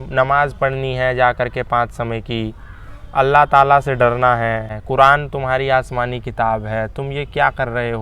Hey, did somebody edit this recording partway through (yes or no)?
yes